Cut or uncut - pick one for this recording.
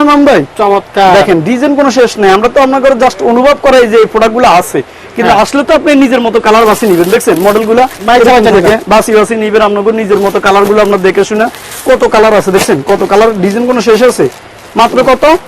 uncut